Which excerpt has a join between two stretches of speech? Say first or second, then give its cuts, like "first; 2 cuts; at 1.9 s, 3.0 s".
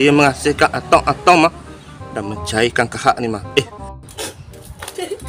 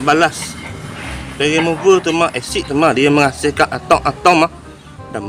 first; 1 cut; at 4.0 s